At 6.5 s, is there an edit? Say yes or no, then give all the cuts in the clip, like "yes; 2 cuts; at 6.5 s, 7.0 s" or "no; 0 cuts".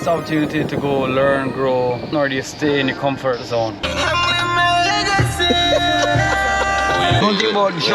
no; 2 cuts; at 2.1 s, 3.8 s